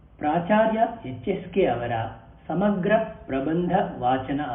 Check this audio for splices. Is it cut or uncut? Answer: cut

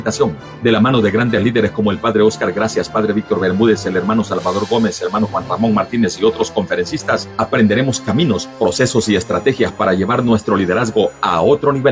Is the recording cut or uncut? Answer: cut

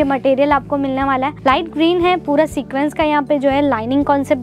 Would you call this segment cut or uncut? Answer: cut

